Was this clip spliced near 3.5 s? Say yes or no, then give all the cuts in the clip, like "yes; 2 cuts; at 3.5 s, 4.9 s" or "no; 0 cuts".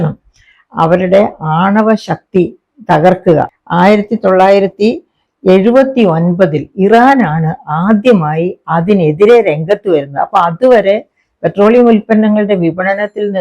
yes; 1 cut; at 3.5 s